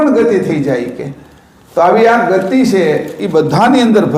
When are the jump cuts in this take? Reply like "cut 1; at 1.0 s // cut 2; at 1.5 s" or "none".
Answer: none